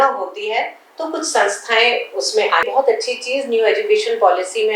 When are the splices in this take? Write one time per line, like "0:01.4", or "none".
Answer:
0:02.7